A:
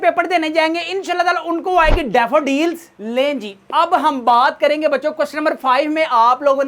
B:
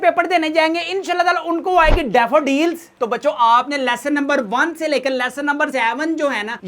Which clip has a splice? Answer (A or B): B